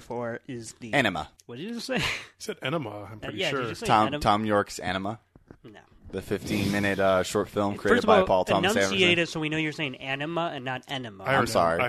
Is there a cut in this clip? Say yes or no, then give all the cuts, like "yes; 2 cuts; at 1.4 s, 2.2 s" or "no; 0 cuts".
yes; 1 cut; at 1.4 s